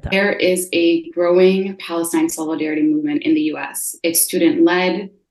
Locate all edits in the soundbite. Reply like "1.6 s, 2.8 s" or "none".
none